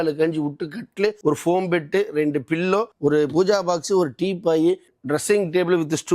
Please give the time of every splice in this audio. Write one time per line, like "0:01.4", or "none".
0:01.2
0:02.9
0:04.9